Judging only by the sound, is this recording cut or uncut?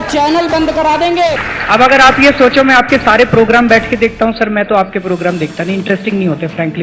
cut